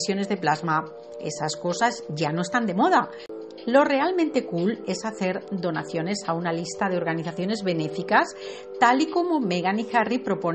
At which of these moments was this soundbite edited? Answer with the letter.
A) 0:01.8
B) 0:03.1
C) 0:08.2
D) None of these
B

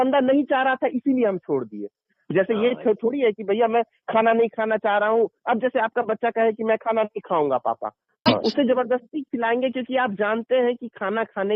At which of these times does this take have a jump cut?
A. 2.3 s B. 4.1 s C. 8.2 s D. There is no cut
C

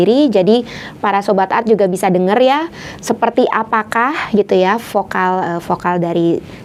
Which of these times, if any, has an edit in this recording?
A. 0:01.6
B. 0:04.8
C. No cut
C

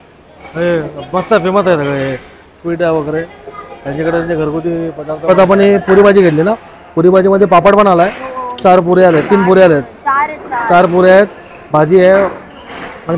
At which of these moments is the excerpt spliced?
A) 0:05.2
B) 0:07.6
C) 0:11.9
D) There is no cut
A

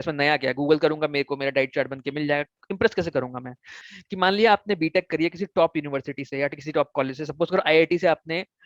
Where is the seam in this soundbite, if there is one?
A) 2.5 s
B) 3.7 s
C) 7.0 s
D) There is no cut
B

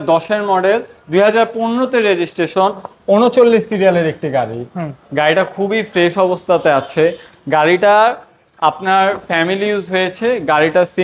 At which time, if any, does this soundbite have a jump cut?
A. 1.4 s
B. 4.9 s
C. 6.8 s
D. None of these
D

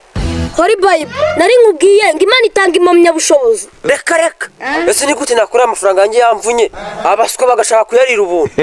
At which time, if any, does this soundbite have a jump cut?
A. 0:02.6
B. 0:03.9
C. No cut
B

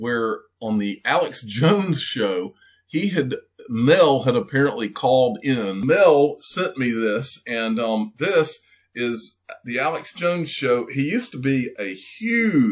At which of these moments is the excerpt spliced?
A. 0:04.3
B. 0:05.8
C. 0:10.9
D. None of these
B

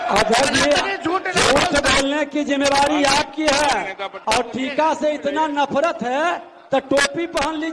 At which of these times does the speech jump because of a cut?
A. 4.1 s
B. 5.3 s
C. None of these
A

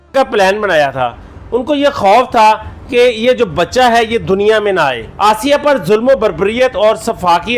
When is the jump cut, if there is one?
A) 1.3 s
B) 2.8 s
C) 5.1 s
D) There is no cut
C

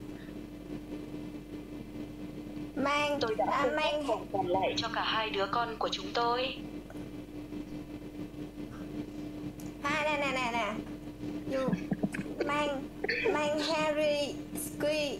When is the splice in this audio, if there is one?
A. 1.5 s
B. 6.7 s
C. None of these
C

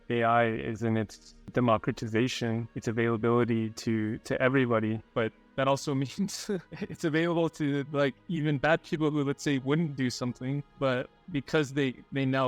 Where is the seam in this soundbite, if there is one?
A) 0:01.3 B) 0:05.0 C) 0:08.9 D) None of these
A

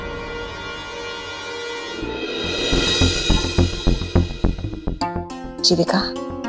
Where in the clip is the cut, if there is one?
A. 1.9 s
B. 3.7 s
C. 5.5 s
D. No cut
A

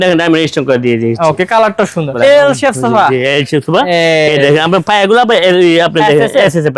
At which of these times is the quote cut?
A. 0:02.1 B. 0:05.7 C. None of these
A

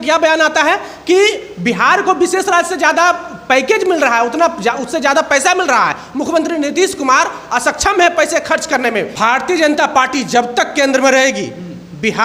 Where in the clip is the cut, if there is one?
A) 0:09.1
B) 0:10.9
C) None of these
A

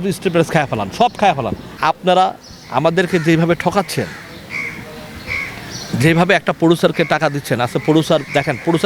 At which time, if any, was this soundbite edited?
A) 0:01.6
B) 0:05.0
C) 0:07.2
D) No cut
A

